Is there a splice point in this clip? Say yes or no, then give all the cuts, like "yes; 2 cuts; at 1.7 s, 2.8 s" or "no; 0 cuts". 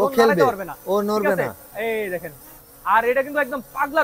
no; 0 cuts